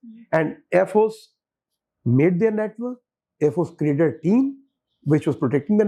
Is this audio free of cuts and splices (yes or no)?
yes